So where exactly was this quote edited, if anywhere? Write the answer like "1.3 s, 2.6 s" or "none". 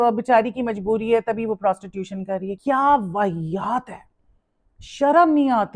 2.5 s